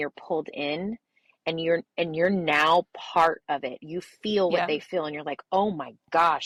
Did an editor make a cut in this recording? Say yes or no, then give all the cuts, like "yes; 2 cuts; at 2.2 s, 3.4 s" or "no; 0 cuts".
no; 0 cuts